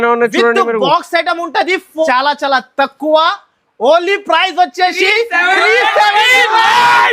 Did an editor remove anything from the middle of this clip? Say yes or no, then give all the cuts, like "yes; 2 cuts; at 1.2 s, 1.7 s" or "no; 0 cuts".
yes; 1 cut; at 2.1 s